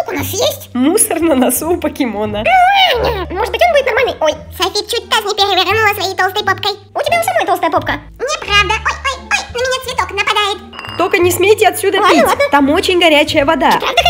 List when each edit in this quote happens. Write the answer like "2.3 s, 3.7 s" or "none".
3.2 s, 6.8 s, 10.9 s